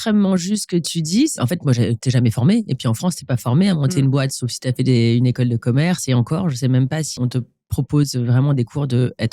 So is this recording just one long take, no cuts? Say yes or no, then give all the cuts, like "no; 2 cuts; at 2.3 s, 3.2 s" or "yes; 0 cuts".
no; 2 cuts; at 1.4 s, 7.2 s